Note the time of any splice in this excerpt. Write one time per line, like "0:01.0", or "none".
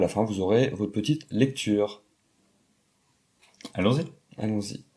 none

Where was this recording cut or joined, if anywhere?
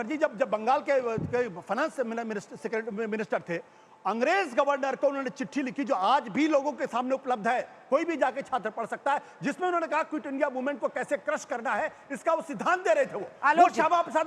none

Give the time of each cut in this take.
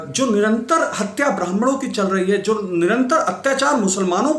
none

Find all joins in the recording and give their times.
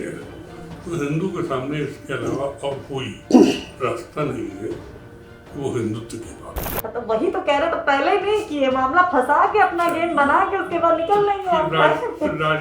0:06.6

